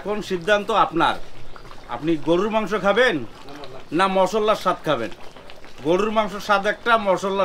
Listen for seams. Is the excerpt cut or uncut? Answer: uncut